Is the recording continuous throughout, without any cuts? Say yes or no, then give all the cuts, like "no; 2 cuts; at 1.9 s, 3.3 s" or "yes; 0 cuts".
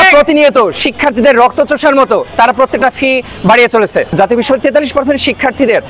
no; 1 cut; at 4.1 s